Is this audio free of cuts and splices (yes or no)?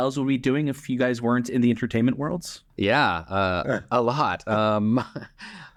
yes